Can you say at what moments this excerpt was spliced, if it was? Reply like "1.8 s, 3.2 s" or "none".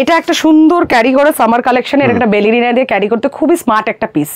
none